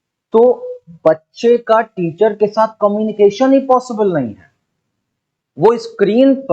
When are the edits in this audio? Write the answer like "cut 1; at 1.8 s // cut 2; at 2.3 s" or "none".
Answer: none